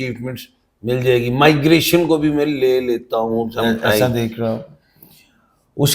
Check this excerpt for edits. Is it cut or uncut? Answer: cut